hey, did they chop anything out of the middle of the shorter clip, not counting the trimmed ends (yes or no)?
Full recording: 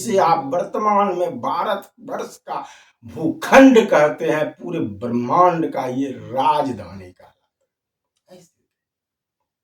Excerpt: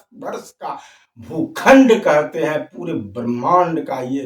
no